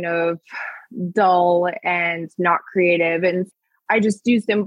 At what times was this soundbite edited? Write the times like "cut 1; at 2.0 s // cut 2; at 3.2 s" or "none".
cut 1; at 3.5 s